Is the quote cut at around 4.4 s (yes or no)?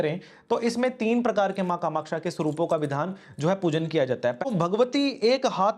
yes